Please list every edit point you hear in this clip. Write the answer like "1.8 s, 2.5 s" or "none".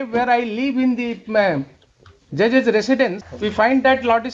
3.3 s